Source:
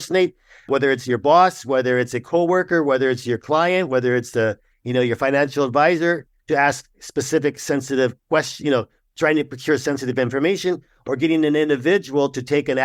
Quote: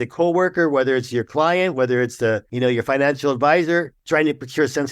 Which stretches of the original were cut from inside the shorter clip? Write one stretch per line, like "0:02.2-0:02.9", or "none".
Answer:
0:04.6-0:04.8
0:06.3-0:09.1